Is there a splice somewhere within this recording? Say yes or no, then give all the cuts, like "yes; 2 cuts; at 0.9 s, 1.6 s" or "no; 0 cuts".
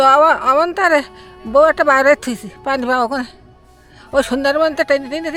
no; 0 cuts